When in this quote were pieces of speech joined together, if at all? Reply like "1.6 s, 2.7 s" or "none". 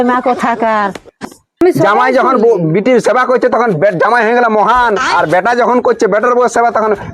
1.6 s